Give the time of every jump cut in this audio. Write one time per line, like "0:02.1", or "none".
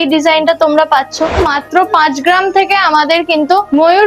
0:01.4